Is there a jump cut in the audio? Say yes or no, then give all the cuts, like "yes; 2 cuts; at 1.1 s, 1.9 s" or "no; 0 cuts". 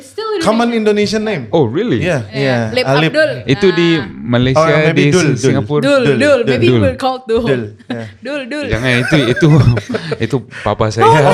yes; 1 cut; at 2.3 s